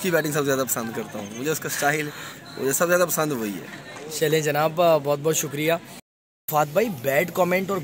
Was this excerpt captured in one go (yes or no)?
yes